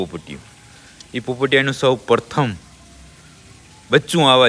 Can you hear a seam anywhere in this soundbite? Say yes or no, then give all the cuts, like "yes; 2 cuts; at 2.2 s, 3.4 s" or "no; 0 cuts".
no; 0 cuts